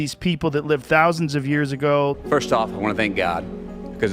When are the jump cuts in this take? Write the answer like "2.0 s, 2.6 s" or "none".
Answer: 2.2 s